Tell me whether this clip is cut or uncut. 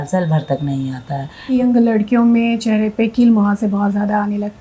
cut